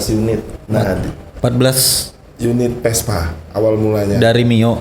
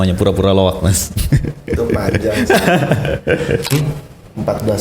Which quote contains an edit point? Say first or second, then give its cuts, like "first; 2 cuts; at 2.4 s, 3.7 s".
second; 1 cut; at 3.7 s